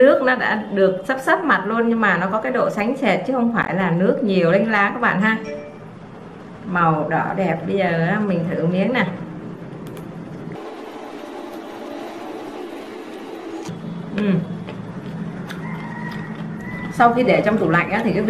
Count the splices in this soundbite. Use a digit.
1